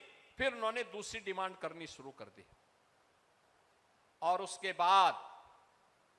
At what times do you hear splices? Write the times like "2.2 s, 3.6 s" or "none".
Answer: none